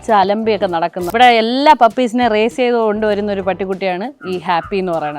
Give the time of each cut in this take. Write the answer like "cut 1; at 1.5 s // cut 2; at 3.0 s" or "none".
cut 1; at 1.0 s